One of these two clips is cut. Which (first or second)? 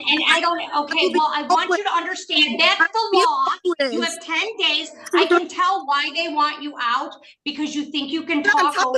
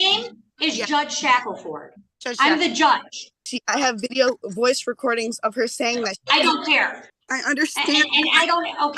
second